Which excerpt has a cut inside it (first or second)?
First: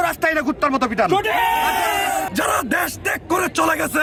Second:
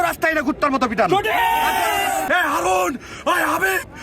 second